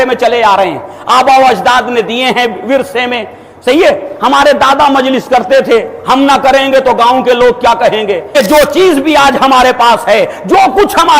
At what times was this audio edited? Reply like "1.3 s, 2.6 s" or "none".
8.2 s